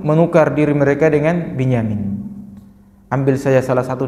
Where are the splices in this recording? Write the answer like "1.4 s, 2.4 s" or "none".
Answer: none